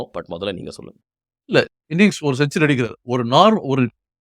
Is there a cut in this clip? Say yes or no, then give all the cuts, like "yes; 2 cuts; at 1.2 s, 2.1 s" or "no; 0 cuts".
yes; 1 cut; at 1.7 s